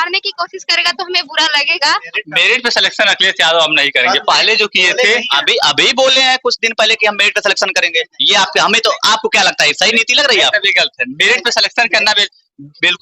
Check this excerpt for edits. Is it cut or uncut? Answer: cut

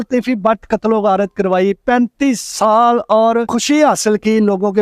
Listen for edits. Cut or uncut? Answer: cut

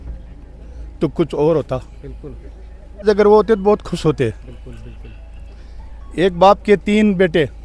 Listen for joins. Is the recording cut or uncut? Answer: cut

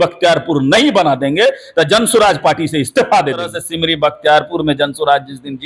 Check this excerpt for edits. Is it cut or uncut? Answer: cut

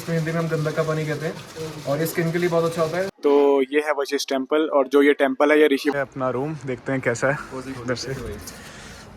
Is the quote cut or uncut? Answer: cut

